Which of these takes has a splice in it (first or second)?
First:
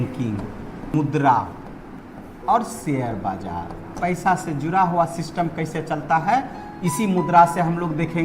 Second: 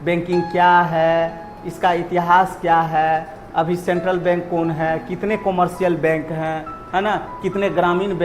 first